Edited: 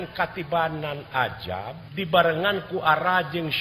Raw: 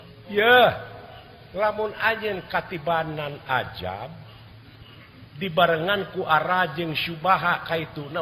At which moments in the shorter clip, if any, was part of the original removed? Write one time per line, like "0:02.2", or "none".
0:01.8

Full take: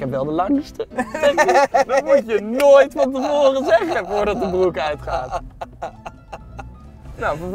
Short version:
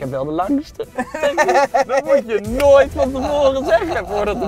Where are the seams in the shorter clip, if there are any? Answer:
none

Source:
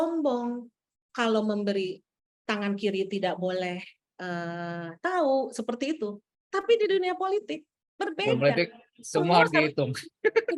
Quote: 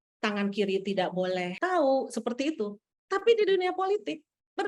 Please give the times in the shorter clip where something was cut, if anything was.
0:01.5

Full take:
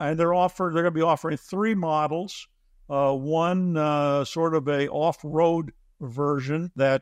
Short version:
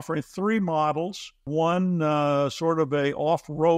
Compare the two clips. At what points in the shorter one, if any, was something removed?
0:01.5

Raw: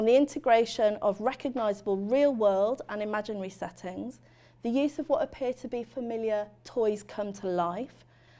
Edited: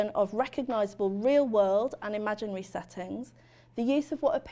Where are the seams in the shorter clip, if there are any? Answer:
none

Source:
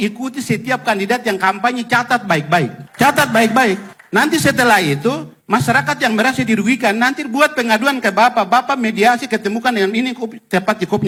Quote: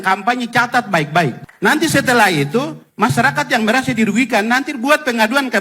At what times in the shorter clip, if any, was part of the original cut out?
0:01.4

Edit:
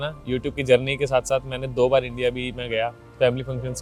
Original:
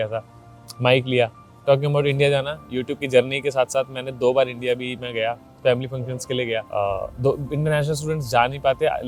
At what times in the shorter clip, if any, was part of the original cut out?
none

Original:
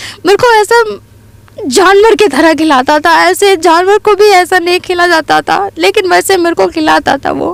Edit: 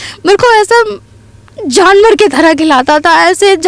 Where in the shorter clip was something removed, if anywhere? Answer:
none

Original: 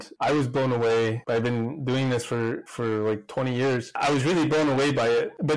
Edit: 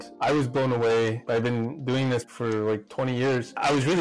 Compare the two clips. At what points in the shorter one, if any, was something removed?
0:02.3

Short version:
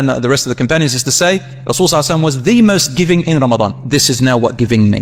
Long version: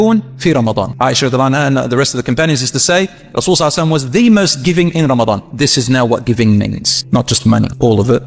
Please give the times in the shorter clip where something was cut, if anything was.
none

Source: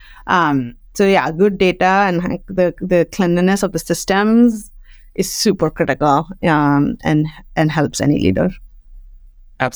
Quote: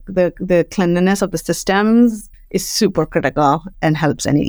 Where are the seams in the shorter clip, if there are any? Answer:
0:02.3
0:03.7

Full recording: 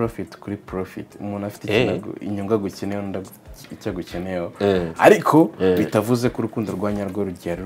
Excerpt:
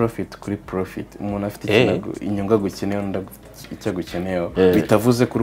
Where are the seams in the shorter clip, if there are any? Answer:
0:04.5

